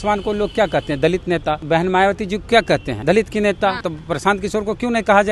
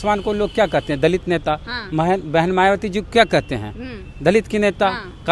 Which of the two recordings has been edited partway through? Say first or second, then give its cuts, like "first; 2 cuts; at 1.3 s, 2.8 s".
first; 3 cuts; at 1.6 s, 2.9 s, 3.9 s